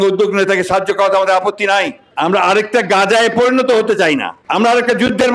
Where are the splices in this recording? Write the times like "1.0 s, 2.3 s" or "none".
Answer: 2.0 s, 4.4 s